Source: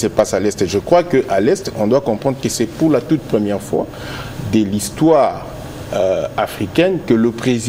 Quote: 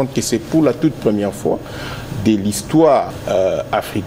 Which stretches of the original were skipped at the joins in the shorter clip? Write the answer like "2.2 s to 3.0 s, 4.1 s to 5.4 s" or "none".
5.4 s to 5.8 s